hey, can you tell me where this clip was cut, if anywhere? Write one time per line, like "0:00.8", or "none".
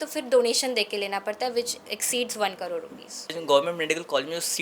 0:03.4

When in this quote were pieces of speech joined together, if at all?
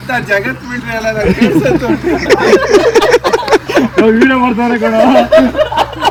none

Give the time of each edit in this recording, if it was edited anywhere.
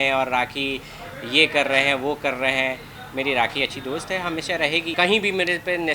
0:04.9

